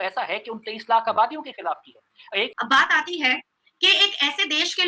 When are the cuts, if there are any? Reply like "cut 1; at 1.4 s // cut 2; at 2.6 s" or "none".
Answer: cut 1; at 2.5 s